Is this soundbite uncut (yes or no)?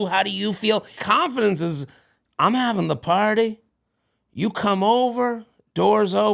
no